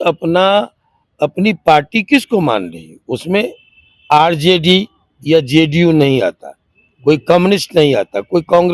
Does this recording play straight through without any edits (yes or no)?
yes